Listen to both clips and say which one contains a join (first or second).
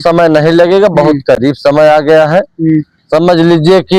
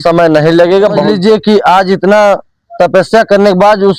second